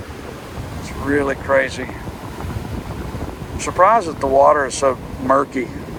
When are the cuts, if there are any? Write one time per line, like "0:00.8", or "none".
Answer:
none